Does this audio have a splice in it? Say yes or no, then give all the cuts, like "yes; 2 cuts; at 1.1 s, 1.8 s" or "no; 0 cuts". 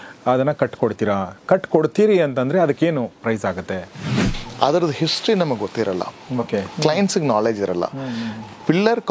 yes; 1 cut; at 4.1 s